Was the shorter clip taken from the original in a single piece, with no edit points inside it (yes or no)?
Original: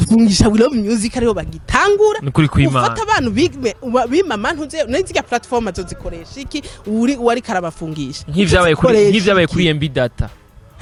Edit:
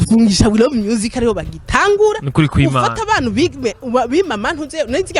yes